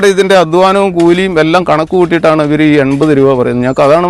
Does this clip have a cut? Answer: no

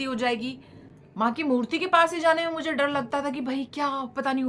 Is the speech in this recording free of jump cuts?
yes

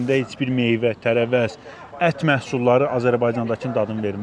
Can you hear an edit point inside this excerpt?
no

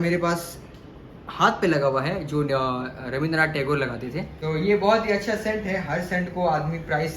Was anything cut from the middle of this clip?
yes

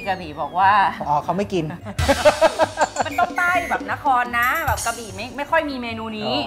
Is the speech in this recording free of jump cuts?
yes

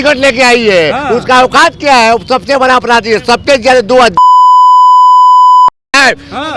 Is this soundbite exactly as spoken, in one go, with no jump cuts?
yes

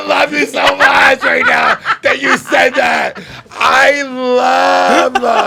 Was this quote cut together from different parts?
no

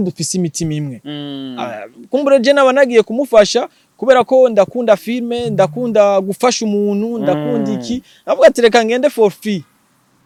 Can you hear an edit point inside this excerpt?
no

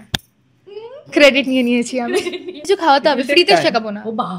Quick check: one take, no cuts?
no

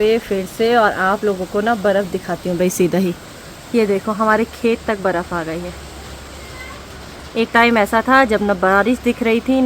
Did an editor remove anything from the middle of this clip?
no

